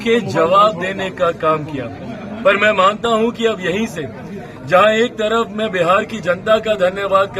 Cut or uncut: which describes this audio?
uncut